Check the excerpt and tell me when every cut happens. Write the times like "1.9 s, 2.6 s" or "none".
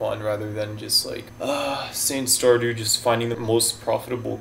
1.3 s, 3.3 s

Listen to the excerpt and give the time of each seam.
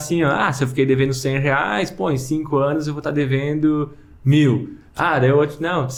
none

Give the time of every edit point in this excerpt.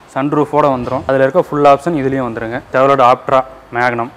1.0 s, 2.7 s

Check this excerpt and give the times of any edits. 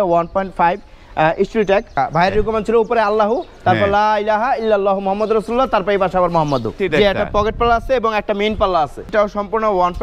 1.9 s, 6.8 s, 9.1 s

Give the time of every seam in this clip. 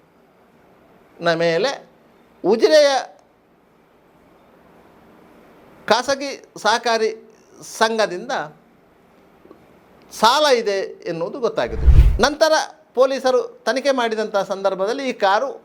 11.8 s

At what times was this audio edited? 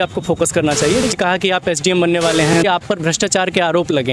1.1 s, 2.6 s

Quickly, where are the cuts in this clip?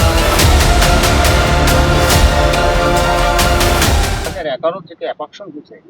4.3 s

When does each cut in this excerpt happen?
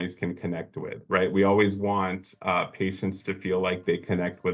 none

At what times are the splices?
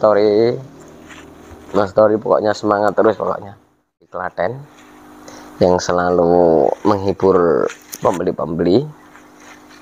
4.1 s

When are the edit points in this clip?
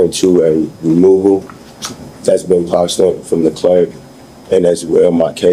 none

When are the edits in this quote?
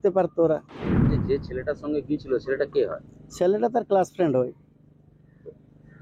1.1 s

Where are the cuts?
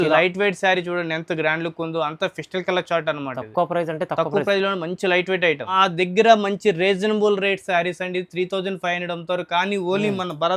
5.7 s

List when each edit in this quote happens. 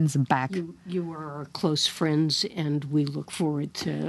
none

